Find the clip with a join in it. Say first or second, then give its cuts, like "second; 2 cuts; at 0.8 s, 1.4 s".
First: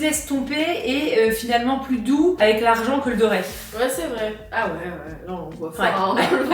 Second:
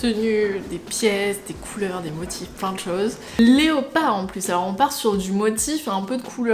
second; 1 cut; at 3.4 s